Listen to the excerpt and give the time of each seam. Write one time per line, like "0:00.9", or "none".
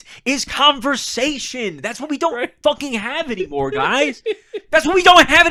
none